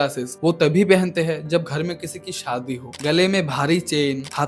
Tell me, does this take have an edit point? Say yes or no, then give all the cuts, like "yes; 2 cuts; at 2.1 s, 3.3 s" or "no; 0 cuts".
yes; 1 cut; at 2.9 s